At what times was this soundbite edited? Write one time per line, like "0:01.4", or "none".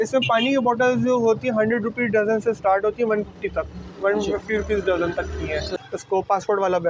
0:05.7